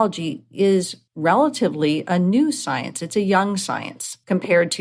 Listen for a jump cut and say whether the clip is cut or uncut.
cut